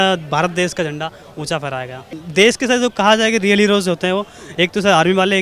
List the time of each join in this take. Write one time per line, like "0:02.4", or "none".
0:02.0